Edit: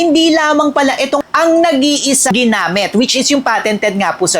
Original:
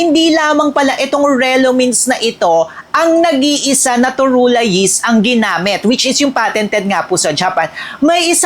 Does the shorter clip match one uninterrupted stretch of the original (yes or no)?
no